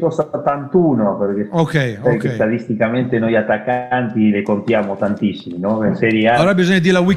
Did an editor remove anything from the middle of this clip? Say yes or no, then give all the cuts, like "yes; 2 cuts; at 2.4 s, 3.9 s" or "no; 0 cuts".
no; 0 cuts